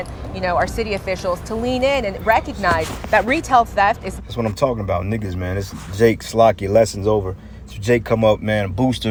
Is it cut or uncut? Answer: uncut